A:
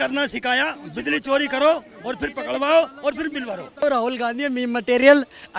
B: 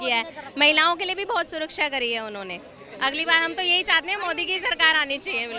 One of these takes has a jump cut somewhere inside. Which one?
A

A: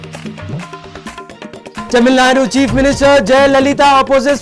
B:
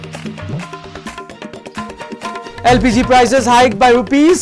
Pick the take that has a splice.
B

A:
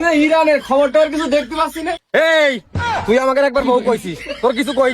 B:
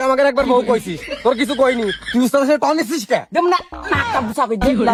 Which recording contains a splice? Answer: A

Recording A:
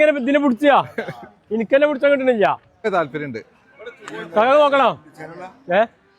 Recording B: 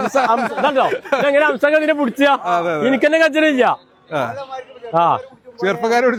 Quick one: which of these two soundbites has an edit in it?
A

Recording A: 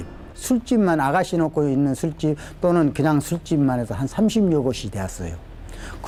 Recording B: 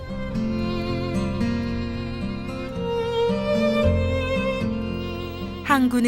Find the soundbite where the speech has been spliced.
B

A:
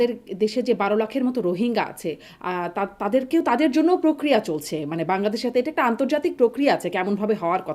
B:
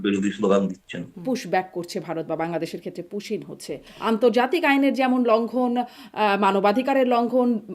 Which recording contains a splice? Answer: B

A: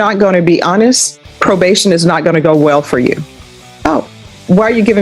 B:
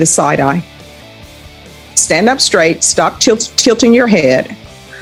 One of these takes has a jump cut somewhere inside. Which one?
A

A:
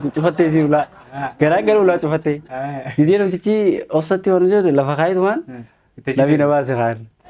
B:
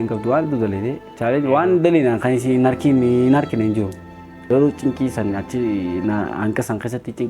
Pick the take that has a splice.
B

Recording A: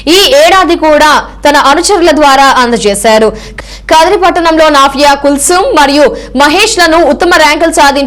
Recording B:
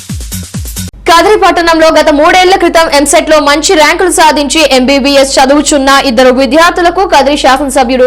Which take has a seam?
B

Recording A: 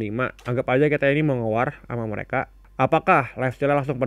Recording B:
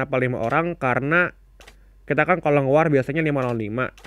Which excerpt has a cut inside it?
A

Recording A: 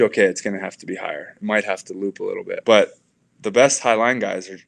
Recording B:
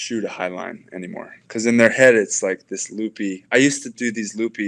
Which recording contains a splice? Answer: A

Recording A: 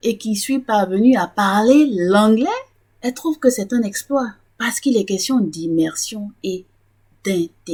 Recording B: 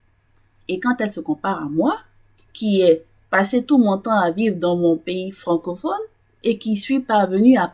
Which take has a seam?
B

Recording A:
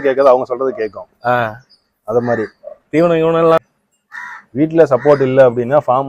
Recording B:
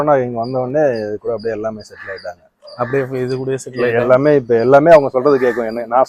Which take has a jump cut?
A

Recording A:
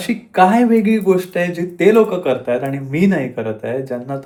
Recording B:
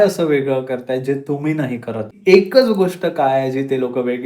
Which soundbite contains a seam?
B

